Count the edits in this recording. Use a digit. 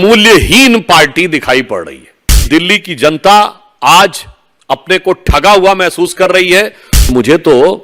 2